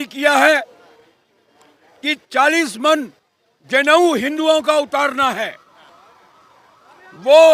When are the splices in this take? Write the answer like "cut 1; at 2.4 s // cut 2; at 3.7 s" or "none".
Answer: none